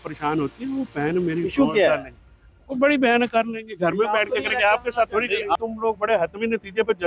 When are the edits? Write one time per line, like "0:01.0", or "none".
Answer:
0:05.6